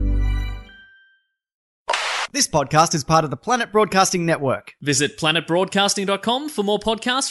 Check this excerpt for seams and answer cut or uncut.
cut